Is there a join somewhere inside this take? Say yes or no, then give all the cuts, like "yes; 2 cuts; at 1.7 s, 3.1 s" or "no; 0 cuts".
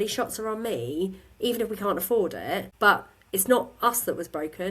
yes; 1 cut; at 2.7 s